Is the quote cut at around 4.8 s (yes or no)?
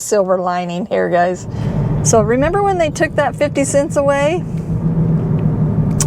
no